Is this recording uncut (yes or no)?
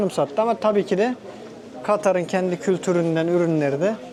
yes